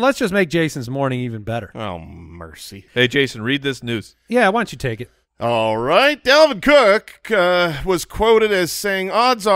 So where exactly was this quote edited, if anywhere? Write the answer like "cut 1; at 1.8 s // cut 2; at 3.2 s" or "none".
cut 1; at 2.8 s